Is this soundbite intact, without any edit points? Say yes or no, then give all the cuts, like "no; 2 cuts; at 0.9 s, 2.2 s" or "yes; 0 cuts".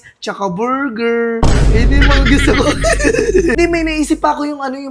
no; 1 cut; at 3.5 s